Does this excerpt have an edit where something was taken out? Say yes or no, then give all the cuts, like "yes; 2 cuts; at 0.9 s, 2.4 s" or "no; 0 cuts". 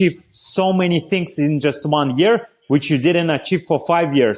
no; 0 cuts